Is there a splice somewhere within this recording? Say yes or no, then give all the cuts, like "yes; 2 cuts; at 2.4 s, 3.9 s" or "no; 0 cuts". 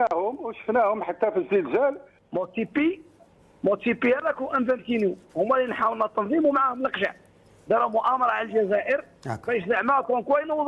yes; 1 cut; at 2.1 s